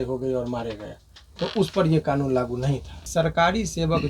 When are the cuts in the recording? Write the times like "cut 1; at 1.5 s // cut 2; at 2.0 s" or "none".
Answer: cut 1; at 3.0 s